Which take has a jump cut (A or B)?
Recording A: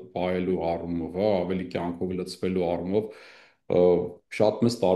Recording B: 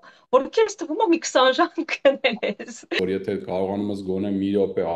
B